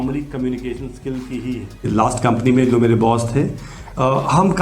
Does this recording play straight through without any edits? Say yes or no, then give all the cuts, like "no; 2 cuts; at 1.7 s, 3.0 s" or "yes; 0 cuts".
no; 1 cut; at 1.8 s